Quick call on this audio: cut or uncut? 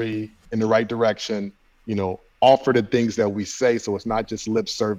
uncut